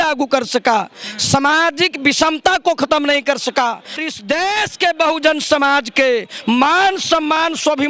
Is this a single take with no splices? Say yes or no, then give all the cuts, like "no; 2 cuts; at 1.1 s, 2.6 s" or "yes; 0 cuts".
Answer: no; 1 cut; at 4.0 s